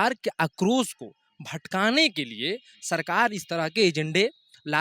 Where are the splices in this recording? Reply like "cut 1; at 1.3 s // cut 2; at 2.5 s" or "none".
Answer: none